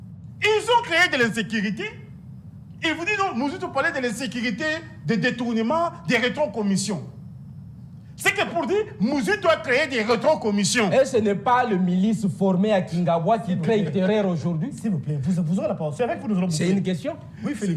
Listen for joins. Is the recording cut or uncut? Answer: uncut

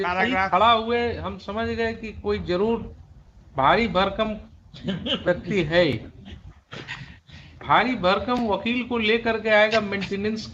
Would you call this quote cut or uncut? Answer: uncut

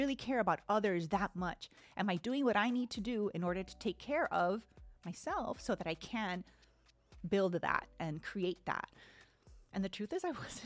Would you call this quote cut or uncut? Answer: uncut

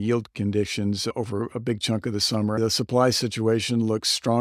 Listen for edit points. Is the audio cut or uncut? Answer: cut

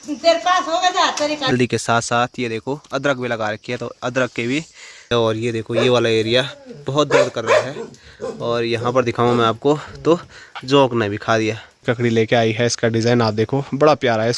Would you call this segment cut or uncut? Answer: cut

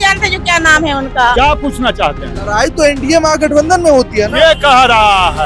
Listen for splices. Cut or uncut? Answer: cut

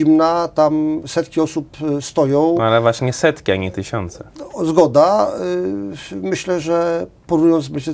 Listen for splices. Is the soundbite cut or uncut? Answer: uncut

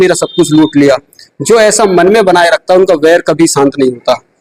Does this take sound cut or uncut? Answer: uncut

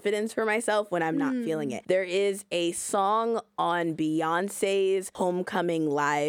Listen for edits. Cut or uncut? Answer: cut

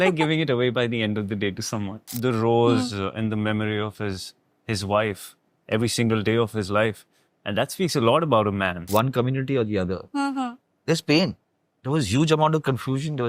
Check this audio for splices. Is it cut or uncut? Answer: cut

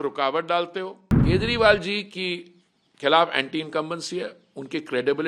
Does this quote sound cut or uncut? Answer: cut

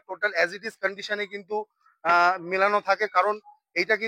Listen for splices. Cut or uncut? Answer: uncut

